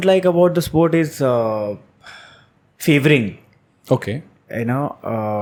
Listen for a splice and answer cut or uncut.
uncut